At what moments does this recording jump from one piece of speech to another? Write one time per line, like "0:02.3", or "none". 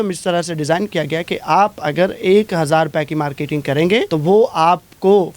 0:04.1